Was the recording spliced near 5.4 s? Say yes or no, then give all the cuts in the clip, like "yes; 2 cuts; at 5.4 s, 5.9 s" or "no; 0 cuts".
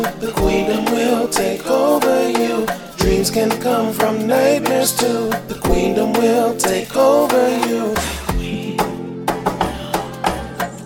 no; 1 cut; at 7.9 s